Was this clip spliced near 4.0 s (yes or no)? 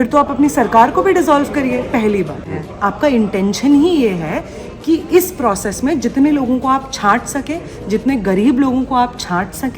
no